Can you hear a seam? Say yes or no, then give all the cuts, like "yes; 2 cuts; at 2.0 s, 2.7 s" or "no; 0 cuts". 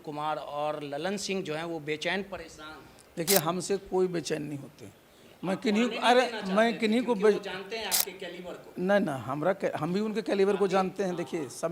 no; 0 cuts